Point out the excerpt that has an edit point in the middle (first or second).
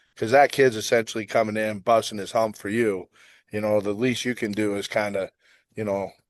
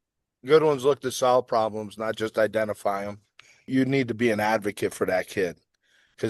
second